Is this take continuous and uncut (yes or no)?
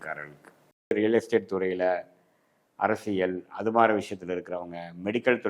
no